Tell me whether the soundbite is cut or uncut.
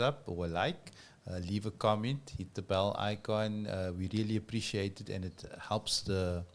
uncut